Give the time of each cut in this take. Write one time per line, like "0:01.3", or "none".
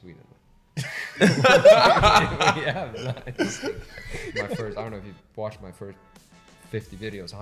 0:04.5